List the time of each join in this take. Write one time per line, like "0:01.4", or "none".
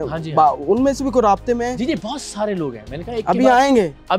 none